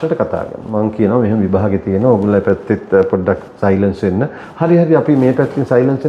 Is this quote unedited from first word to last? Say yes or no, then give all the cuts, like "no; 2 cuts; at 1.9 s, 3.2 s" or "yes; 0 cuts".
yes; 0 cuts